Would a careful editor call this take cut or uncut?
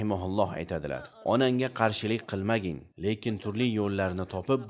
uncut